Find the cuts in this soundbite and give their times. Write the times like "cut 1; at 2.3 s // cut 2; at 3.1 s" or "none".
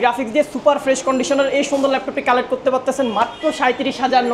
none